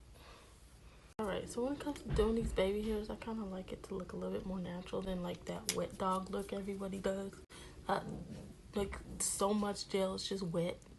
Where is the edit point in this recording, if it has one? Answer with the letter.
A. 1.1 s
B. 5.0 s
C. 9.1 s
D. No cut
A